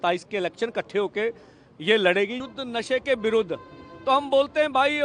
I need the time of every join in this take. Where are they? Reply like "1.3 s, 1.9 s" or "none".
2.4 s